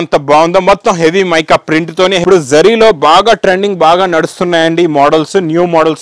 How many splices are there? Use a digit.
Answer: 1